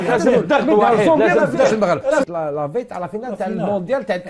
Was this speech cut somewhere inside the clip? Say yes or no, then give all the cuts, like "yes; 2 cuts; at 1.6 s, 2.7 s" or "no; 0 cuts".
yes; 1 cut; at 2.3 s